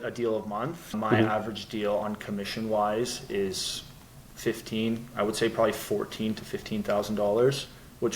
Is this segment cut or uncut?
cut